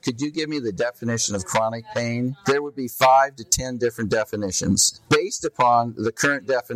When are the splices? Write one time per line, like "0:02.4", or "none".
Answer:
0:04.9